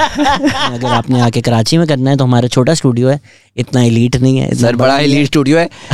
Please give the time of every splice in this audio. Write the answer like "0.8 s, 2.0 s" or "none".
0.9 s